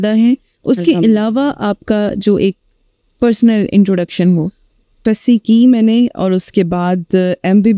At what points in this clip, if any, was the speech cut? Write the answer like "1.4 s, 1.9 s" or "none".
4.9 s